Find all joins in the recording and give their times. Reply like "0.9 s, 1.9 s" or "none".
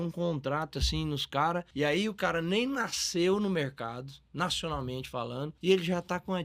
1.7 s, 5.5 s